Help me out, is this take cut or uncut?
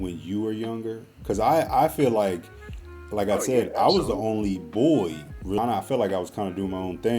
cut